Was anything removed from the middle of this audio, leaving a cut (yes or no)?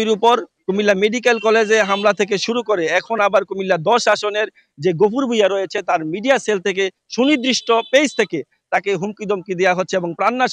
no